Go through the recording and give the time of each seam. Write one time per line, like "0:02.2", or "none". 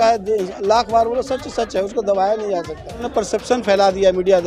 0:03.0